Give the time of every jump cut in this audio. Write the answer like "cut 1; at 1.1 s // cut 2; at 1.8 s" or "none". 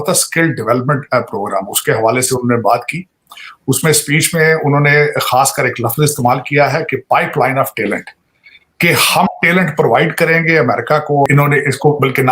cut 1; at 11.3 s